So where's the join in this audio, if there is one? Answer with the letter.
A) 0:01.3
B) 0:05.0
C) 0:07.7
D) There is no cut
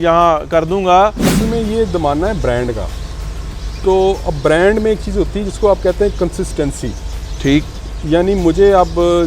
A